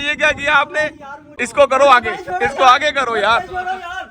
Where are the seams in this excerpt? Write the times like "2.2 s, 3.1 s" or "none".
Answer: 1.4 s